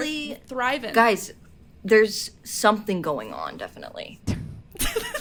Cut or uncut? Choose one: uncut